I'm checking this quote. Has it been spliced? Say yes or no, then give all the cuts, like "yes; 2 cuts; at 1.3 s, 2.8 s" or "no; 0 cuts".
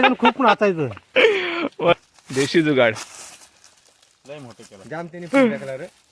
yes; 1 cut; at 1.9 s